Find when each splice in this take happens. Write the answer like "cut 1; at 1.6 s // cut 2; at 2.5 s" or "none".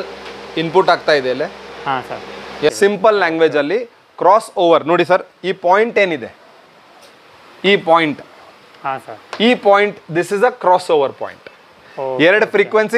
cut 1; at 2.7 s